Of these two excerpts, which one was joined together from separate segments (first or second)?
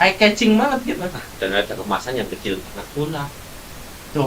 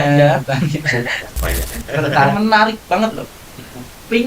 second